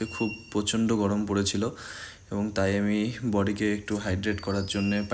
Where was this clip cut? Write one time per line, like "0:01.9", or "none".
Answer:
none